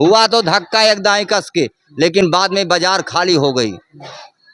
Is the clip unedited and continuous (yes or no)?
yes